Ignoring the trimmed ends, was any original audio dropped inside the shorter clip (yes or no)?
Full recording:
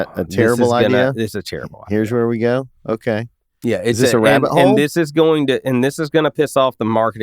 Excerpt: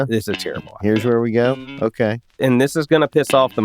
yes